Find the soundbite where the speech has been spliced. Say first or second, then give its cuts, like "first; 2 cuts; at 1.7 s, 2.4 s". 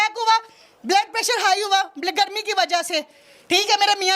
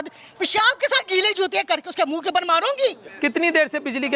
second; 1 cut; at 3.1 s